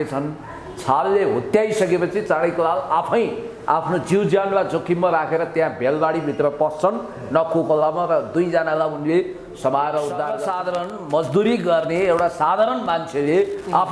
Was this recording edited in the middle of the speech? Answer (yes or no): yes